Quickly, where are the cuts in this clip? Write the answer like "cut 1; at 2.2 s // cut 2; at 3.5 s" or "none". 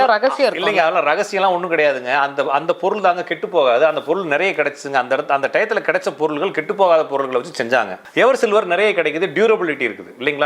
cut 1; at 8.0 s